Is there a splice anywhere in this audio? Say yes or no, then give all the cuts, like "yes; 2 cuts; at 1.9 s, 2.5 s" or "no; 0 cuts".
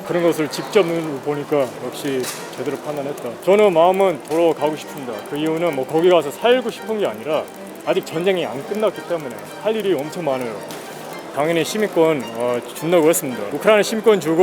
yes; 3 cuts; at 3.3 s, 11.3 s, 13.5 s